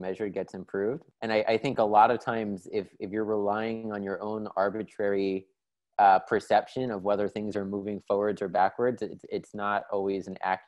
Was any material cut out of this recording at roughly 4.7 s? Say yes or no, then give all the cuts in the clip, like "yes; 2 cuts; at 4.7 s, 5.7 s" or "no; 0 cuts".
no; 1 cut; at 1.1 s